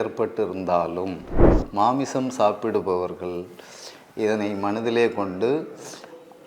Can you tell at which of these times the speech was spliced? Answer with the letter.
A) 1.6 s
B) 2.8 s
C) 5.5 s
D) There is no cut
A